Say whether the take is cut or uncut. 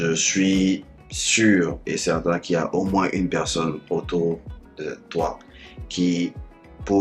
uncut